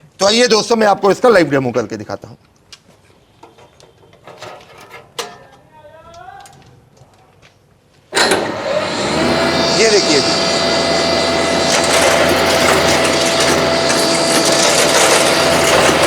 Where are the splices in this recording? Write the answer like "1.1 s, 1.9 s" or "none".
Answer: none